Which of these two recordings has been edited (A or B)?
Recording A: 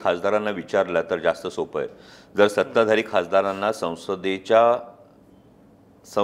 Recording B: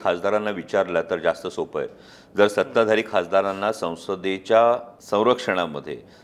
B